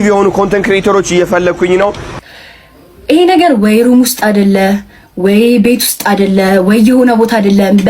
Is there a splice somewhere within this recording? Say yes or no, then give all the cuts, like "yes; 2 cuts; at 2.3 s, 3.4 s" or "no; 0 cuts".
yes; 1 cut; at 2.1 s